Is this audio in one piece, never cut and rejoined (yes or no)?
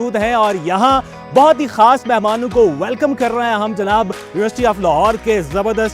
yes